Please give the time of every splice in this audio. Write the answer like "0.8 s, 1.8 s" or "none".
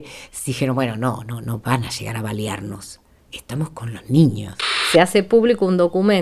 4.8 s